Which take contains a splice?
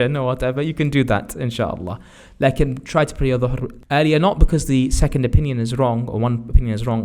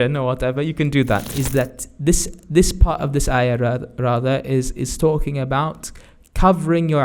second; 1 cut; at 1.3 s

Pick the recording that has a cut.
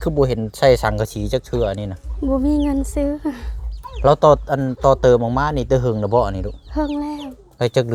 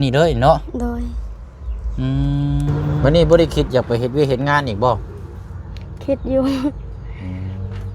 second; 1 cut; at 3.0 s

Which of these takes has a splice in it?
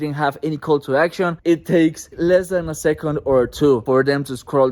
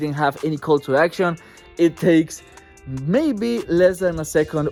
first; 3 cuts; at 1.4 s, 2.1 s, 3.8 s

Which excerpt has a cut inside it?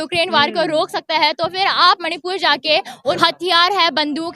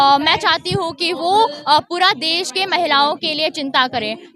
first; 1 cut; at 3.2 s

